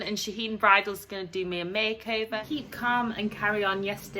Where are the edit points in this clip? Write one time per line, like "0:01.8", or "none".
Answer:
0:02.4